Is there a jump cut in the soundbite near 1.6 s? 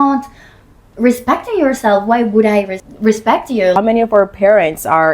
no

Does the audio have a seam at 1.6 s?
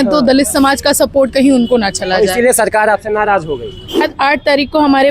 no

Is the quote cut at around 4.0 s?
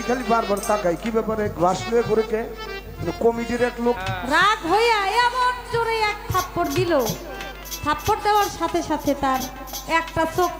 yes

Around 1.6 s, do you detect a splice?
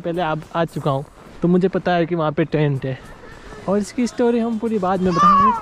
no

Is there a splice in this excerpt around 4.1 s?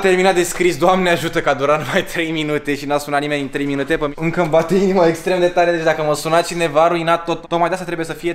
yes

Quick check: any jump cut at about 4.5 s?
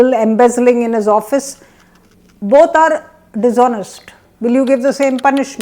yes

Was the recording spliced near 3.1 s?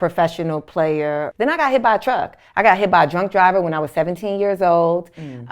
no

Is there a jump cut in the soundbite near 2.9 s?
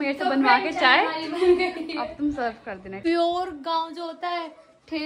yes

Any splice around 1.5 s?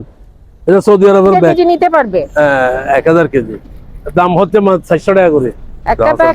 yes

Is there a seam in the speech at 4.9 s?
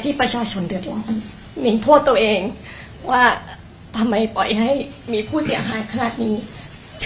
no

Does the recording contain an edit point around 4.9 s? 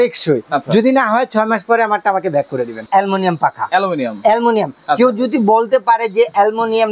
no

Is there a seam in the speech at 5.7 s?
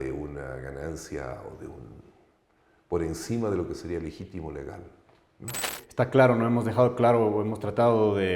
yes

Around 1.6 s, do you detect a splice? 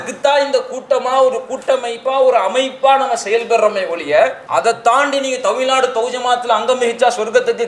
no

